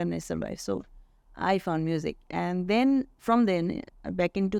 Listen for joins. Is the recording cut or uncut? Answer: uncut